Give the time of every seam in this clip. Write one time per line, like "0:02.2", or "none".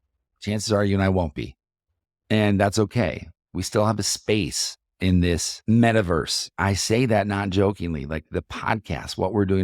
0:05.5
0:06.5